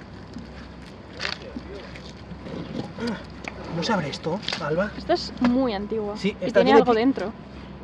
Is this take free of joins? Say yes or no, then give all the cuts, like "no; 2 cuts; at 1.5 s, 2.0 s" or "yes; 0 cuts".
yes; 0 cuts